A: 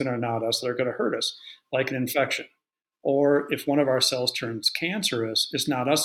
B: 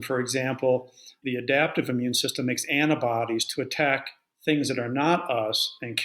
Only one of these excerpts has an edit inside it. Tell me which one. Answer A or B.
B